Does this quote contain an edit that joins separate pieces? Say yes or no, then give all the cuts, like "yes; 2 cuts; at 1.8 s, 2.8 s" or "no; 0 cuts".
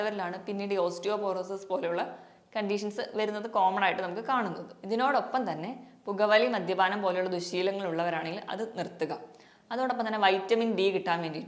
no; 0 cuts